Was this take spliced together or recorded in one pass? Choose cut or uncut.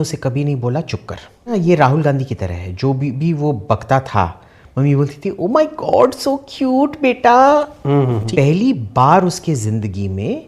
cut